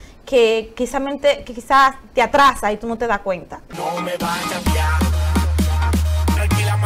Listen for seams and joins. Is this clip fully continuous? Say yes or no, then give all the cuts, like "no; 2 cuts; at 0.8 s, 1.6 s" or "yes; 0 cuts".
no; 1 cut; at 3.8 s